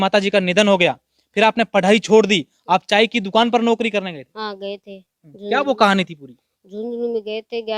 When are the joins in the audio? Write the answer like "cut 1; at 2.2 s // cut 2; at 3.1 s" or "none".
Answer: none